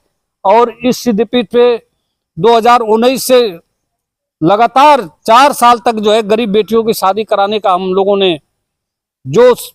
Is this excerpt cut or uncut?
uncut